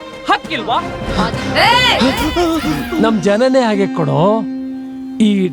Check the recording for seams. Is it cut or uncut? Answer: cut